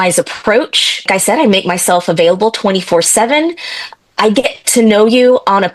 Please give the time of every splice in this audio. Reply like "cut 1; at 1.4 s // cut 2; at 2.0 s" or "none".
none